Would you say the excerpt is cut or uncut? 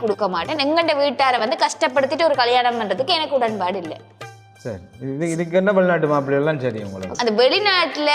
cut